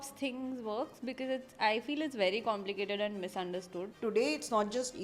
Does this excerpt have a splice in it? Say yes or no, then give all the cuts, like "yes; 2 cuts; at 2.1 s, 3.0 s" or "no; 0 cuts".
yes; 1 cut; at 3.9 s